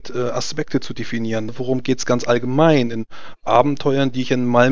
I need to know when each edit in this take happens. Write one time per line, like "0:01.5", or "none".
0:01.5

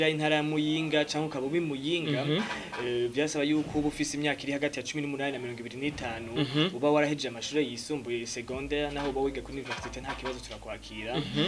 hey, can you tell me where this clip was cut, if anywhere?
none

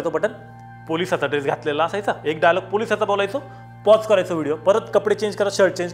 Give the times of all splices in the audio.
none

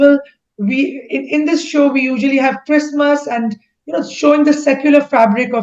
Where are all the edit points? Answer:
none

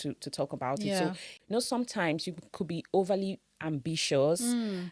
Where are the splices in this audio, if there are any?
0:01.3

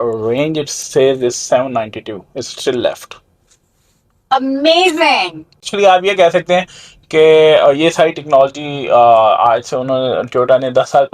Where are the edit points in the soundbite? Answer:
0:05.7

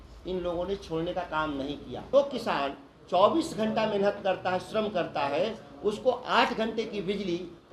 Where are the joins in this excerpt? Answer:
0:01.9

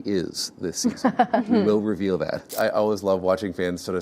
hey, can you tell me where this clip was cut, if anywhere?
0:02.5

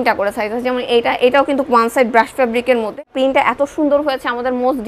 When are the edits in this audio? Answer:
0:03.1

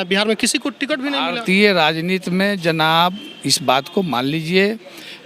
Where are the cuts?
none

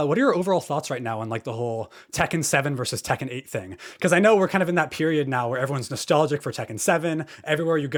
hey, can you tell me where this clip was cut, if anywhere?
none

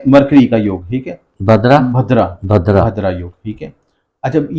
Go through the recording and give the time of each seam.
none

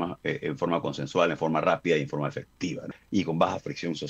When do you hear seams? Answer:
0:02.9

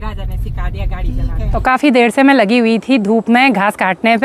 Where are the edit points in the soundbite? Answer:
0:01.5

